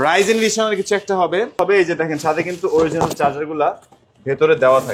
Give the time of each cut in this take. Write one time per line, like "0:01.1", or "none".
0:01.6